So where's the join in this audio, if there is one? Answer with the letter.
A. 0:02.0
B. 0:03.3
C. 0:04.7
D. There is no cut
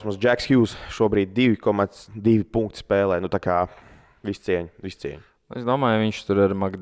D